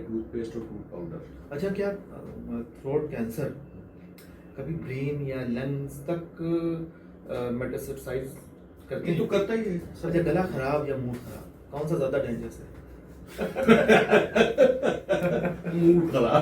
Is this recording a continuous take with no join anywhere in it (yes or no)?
no